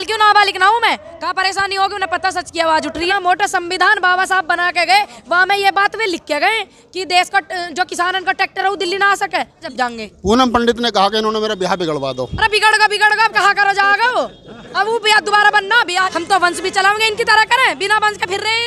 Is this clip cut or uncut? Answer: cut